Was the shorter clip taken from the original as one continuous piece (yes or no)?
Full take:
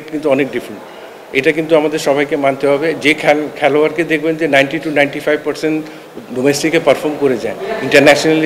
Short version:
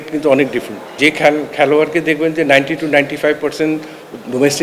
no